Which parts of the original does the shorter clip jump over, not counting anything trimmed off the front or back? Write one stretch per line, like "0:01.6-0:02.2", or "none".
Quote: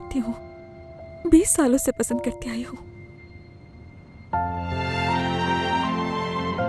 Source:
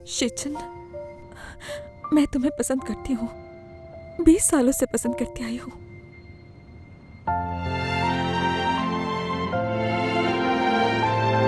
none